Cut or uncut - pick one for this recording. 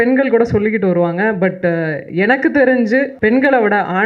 cut